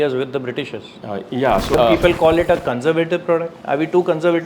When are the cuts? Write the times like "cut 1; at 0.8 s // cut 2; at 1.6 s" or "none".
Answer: cut 1; at 1.7 s